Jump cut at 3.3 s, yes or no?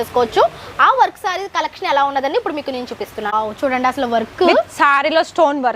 yes